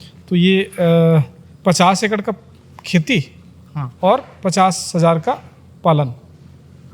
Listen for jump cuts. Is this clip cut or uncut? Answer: uncut